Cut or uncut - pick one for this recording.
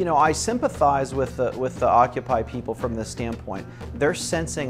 uncut